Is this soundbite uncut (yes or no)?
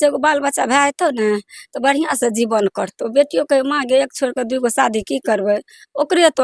yes